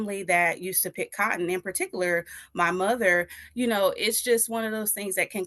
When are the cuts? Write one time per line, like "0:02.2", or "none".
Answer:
none